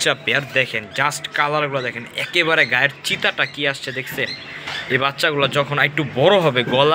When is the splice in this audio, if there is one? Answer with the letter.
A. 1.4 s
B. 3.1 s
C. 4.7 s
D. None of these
D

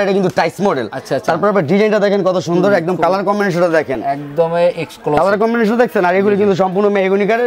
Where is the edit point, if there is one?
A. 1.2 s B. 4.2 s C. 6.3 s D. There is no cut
D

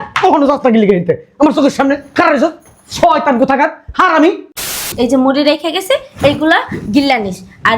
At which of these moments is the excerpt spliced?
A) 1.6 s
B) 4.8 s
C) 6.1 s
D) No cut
B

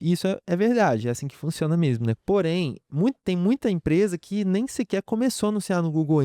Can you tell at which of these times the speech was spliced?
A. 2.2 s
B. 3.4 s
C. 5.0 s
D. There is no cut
A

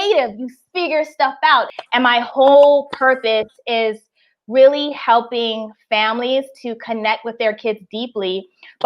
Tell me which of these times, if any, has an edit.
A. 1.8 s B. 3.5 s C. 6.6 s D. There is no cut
A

